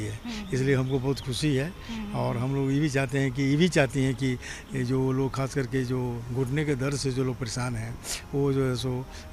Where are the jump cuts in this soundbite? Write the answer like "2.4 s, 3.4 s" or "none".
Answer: none

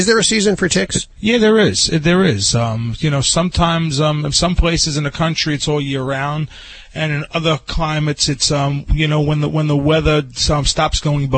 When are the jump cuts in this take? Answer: 1.0 s

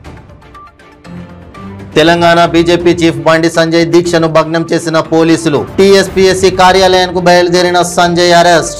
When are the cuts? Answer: 1.8 s

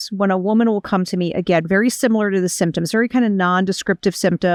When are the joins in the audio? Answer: none

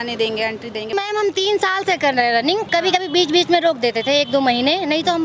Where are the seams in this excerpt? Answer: 0.9 s, 2.7 s

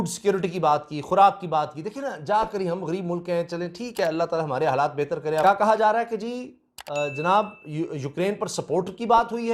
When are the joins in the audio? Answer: none

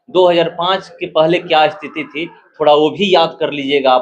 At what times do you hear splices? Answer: none

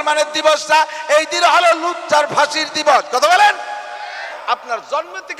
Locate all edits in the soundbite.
4.3 s

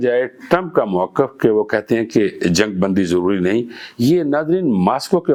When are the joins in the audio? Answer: none

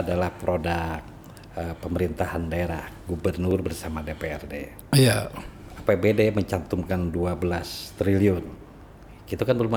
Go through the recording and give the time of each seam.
none

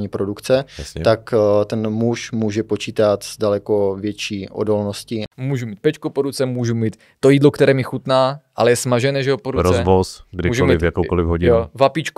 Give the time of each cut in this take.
5.3 s

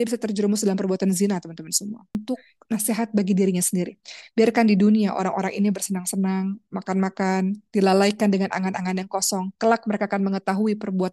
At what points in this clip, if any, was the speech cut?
2.1 s

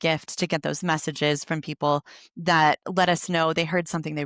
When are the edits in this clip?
none

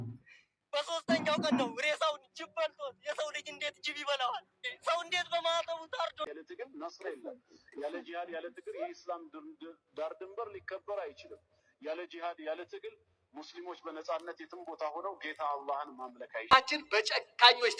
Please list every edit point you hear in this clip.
6.3 s, 16.5 s

